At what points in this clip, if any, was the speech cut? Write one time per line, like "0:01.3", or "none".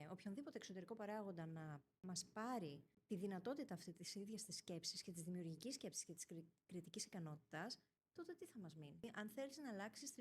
0:01.9
0:02.9
0:09.0